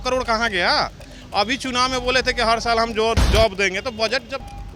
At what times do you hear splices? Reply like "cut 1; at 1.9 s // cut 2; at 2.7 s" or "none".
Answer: cut 1; at 3.2 s